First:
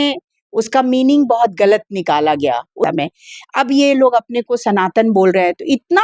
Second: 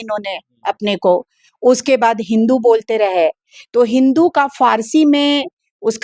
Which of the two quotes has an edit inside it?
first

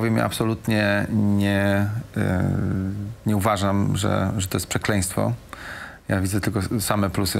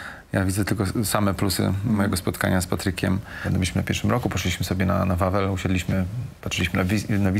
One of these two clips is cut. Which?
second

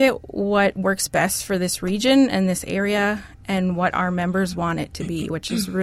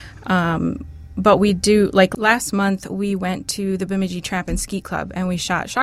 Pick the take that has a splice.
second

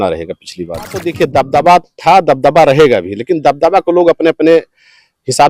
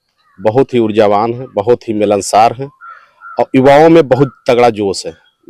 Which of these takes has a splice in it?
first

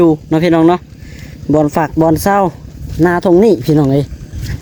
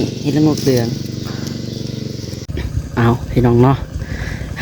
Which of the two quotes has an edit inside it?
second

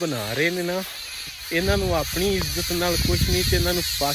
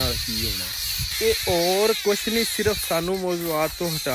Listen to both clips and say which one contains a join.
second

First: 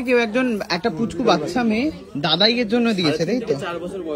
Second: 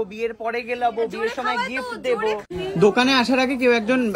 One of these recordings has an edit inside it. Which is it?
second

